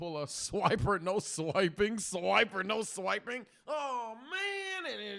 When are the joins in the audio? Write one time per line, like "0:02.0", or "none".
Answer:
none

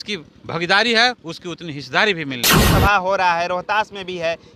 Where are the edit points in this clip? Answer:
0:02.7

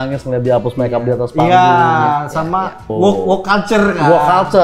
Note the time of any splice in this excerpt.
0:02.9

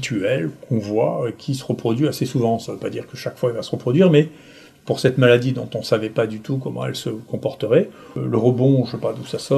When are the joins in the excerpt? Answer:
0:08.0

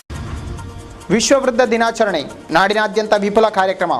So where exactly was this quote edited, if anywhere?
0:01.0

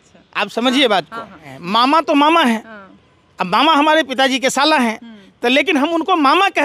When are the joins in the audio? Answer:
0:01.5

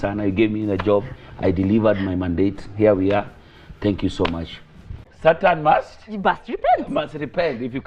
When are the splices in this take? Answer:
0:05.1

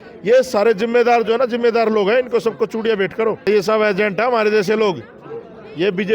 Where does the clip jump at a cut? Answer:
0:03.5

